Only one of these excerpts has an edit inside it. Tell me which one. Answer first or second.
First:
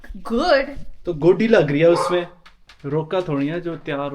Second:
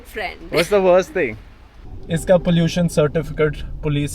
second